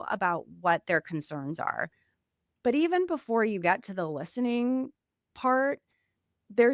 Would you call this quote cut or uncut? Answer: uncut